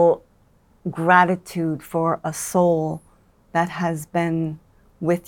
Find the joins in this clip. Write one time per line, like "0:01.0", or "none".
none

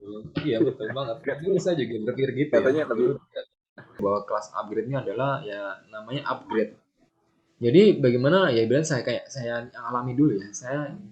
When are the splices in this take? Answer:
0:04.0

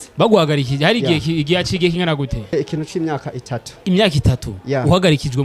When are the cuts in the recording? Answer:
0:02.5

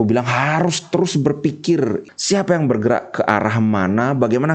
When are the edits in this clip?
0:02.1

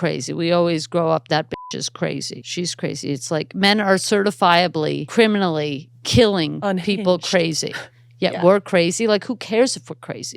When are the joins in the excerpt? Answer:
0:02.4
0:05.0

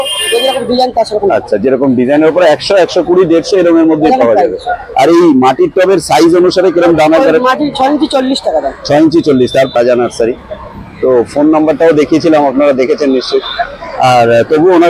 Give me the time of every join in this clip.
0:09.7

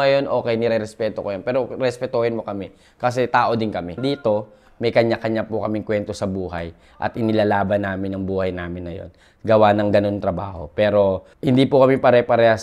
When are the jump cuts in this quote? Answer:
0:04.0
0:11.3

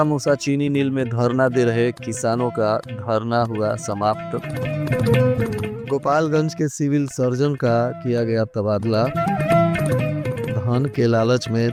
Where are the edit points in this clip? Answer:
none

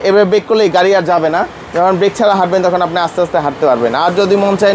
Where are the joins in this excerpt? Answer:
none

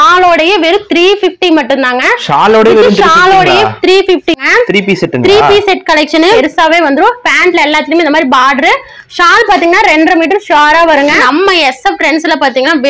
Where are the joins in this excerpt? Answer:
0:04.4
0:06.4
0:11.2

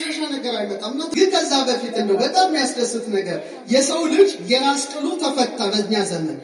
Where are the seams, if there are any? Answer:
0:01.1

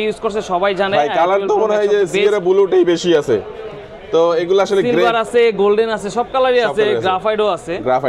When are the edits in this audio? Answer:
none

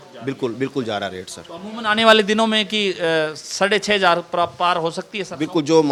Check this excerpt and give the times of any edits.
none

